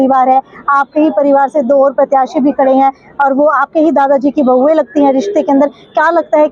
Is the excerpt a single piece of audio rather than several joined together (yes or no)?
yes